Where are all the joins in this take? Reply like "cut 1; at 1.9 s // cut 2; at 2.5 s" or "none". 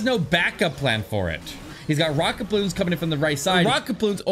cut 1; at 1.8 s // cut 2; at 3.6 s